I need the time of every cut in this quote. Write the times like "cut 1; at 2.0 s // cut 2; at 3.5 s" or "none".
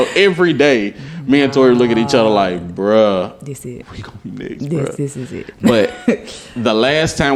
none